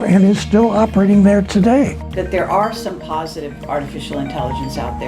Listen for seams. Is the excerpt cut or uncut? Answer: cut